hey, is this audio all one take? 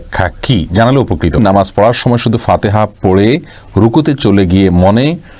no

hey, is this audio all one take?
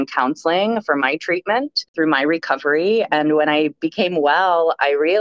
no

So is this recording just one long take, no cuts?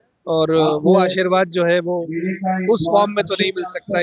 yes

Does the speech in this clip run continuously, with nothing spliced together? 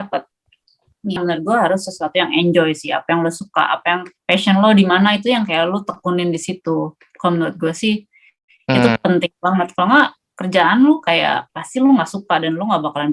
no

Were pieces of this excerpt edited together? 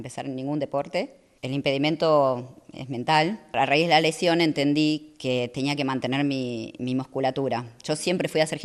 yes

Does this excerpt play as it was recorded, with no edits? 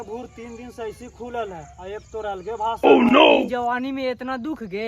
no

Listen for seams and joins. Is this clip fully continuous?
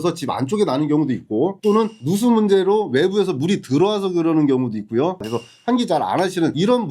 no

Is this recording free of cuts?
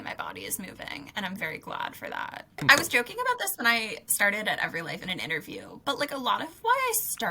no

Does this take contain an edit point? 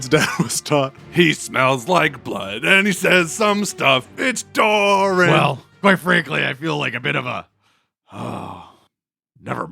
yes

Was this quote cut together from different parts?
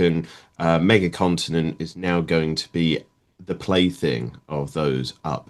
no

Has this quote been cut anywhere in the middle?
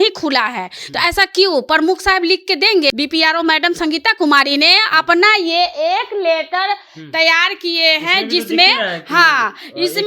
yes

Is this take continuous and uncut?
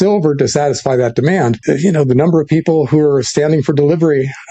no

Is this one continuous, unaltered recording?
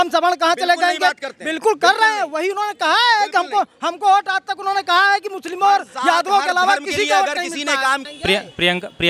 yes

